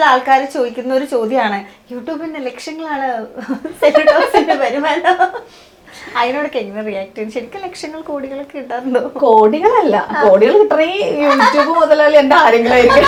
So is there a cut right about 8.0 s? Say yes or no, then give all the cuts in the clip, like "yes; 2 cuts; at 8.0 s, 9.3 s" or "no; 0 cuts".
no; 0 cuts